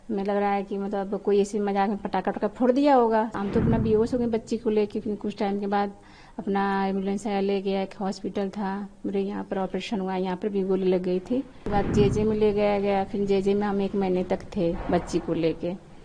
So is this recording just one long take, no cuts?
no; 2 cuts; at 3.3 s, 11.6 s

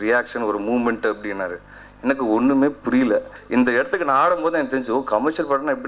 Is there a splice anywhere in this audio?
yes; 1 cut; at 3.4 s

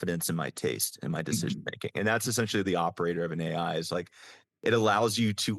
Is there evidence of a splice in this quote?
no; 0 cuts

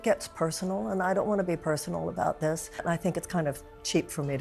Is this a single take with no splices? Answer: no; 1 cut; at 2.8 s

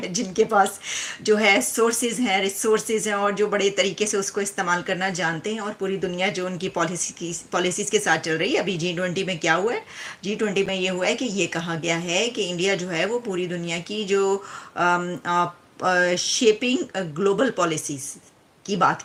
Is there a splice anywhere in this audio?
no; 0 cuts

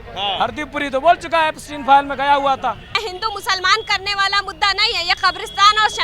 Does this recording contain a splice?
yes; 1 cut; at 3.1 s

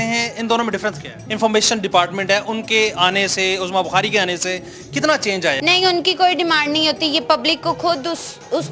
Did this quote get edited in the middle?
yes; 2 cuts; at 1.2 s, 5.6 s

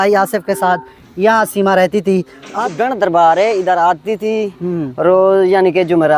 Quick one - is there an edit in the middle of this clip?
yes; 1 cut; at 2.5 s

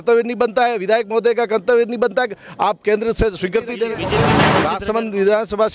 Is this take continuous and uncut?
no; 1 cut; at 4.4 s

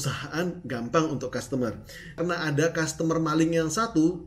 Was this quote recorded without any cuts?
no; 1 cut; at 2.2 s

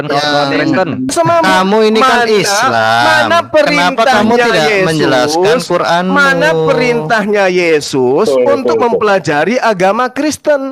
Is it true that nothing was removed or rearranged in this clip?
no; 1 cut; at 1.1 s

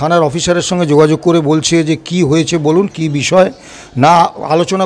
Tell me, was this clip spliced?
no; 0 cuts

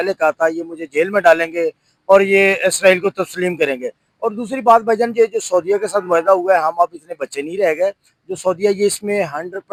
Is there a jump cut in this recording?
no; 0 cuts

